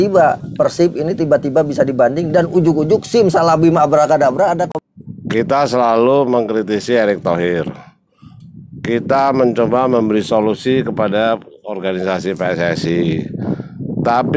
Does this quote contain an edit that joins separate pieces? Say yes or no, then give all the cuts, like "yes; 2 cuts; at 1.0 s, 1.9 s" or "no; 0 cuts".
yes; 1 cut; at 4.7 s